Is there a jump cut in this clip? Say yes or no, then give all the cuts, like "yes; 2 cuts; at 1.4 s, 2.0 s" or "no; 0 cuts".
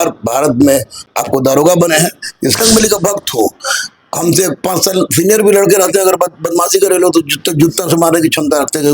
yes; 2 cuts; at 1.1 s, 2.6 s